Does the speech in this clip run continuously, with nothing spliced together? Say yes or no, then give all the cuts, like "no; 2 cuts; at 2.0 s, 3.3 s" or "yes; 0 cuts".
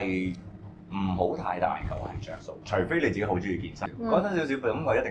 no; 1 cut; at 3.8 s